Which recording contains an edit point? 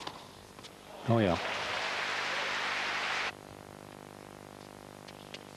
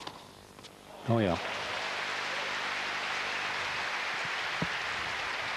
second; 1 cut; at 3.3 s

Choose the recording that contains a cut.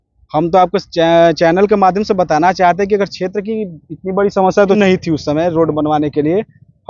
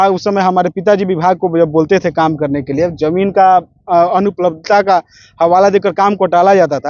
first; 1 cut; at 4.8 s

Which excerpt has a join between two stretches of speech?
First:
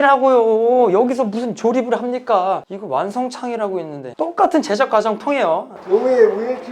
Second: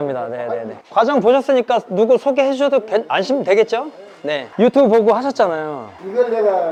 first; 1 cut; at 5.8 s

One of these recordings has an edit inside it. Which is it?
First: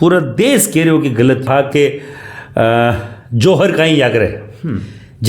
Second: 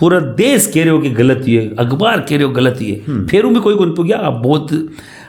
first; 1 cut; at 1.5 s

